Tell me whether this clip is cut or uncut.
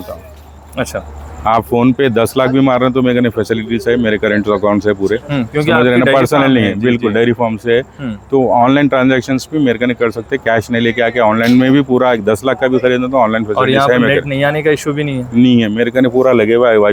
uncut